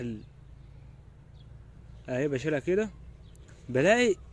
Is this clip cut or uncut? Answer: uncut